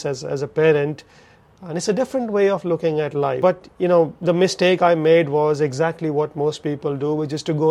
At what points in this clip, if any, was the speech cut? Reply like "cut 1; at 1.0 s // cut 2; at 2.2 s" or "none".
cut 1; at 3.4 s